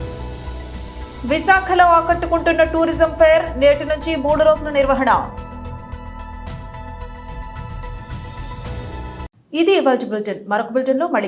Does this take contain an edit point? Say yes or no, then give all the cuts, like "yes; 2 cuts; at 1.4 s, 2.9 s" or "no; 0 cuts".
no; 0 cuts